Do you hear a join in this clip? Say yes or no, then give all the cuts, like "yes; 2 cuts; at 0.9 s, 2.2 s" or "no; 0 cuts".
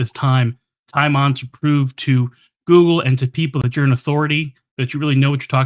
no; 0 cuts